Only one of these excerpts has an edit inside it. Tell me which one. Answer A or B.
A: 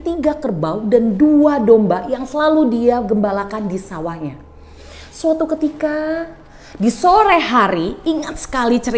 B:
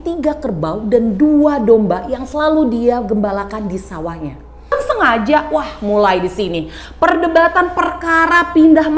B